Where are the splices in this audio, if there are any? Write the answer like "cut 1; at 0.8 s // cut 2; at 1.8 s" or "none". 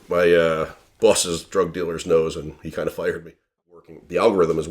cut 1; at 3.6 s